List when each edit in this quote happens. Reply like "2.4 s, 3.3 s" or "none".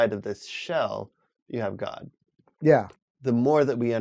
2.9 s